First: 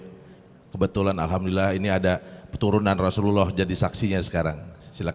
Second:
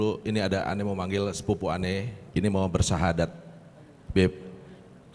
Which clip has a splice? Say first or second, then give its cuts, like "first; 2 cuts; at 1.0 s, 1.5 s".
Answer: second; 1 cut; at 2.2 s